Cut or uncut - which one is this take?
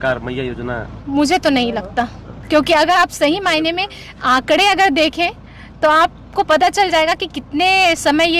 cut